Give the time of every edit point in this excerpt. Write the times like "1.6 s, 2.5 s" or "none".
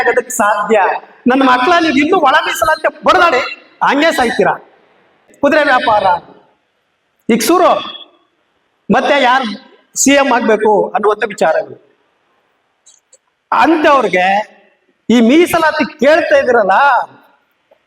5.3 s